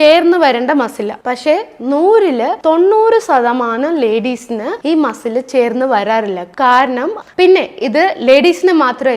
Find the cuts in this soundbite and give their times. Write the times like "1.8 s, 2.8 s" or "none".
7.2 s

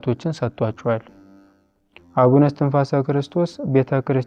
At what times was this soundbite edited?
none

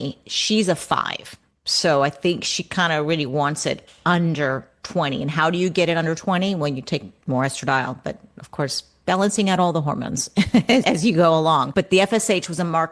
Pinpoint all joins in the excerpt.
7.1 s, 11.7 s

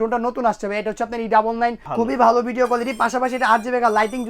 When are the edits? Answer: 1.8 s

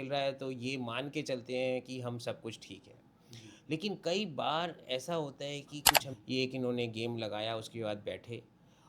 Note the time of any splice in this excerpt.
6.0 s

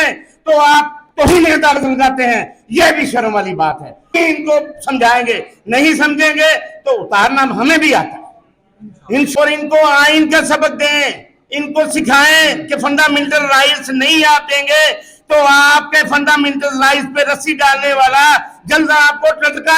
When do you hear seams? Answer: 4.2 s, 9.3 s

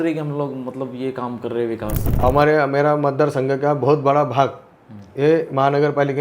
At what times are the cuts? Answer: 2.0 s

